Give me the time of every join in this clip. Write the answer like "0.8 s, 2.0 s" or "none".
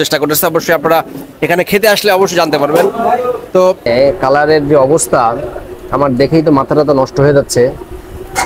3.9 s